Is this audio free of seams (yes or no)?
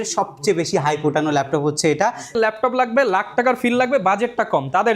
no